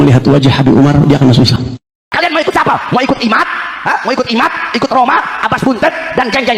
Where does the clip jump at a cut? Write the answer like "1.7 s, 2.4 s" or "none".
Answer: 1.7 s